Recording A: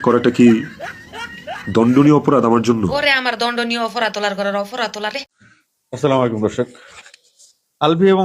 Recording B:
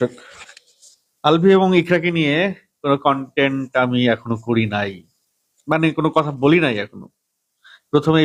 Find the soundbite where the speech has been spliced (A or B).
A